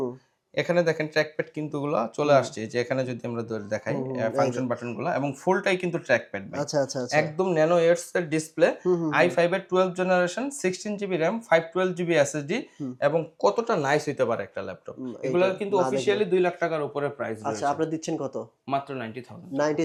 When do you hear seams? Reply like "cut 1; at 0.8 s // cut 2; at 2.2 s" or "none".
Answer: none